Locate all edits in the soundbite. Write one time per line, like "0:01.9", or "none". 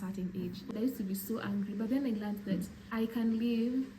0:00.7
0:02.8